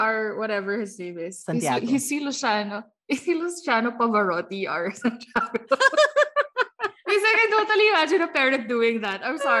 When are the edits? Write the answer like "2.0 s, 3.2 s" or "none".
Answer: none